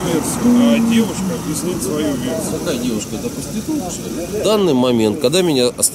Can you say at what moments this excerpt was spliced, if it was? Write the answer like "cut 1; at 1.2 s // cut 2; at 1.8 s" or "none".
cut 1; at 2.6 s // cut 2; at 4.4 s